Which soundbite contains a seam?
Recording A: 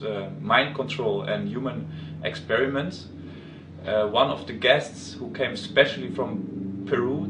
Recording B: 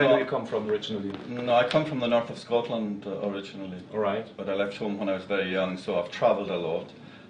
B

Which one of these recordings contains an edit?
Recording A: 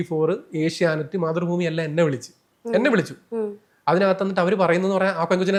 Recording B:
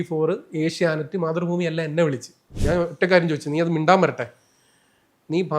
B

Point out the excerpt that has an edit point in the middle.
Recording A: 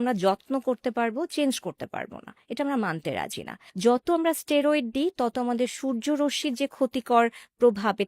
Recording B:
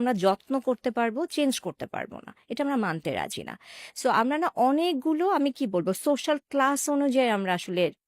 A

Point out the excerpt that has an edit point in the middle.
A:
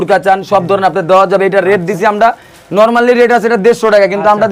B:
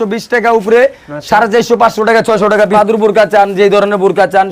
B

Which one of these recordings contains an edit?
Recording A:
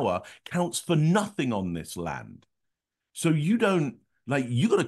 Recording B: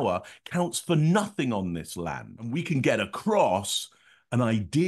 B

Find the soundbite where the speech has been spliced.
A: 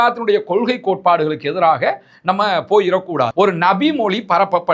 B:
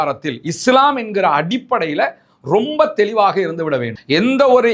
A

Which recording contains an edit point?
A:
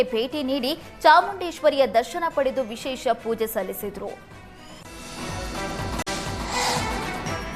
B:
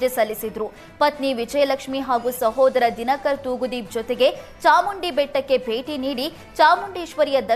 A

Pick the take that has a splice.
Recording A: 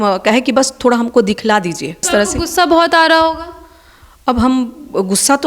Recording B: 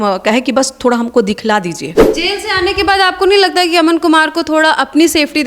B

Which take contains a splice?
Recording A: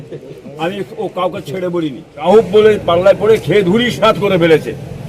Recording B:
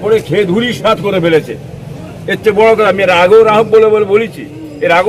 A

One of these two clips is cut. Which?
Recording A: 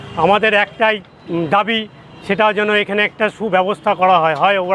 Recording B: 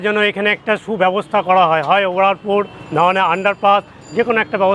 A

